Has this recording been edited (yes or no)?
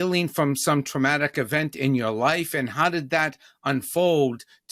no